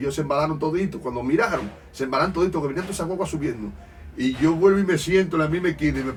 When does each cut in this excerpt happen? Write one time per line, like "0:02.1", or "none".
none